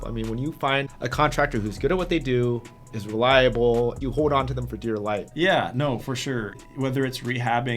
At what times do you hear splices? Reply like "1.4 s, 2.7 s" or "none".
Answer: 0.8 s, 4.0 s, 5.3 s, 6.5 s

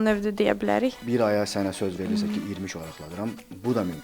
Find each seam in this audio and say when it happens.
1.0 s

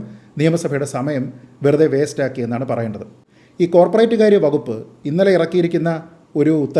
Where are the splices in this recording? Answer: 3.1 s

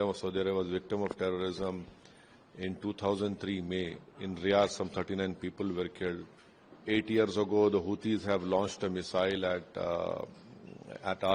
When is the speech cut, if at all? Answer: none

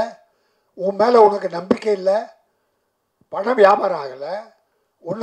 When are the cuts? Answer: none

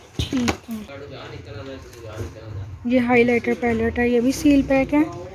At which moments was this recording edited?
0.9 s

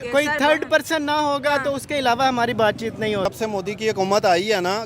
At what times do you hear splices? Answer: 3.3 s

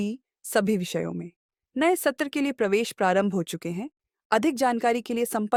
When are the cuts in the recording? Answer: none

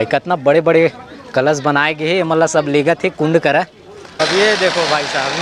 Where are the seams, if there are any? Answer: 4.2 s

